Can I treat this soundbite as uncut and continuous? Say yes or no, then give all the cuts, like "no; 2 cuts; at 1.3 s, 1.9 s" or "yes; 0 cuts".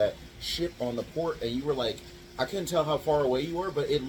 yes; 0 cuts